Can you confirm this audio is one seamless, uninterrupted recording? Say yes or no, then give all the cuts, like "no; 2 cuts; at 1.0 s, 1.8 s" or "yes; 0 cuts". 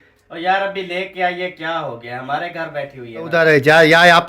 no; 1 cut; at 3.3 s